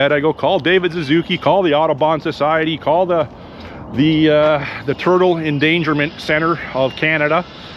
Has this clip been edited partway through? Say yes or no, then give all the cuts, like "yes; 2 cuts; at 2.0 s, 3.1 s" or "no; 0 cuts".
no; 0 cuts